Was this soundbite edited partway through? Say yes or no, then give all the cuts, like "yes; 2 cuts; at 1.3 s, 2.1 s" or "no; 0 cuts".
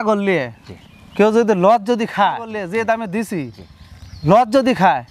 no; 0 cuts